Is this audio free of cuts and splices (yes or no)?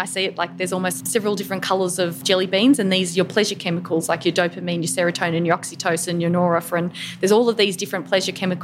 no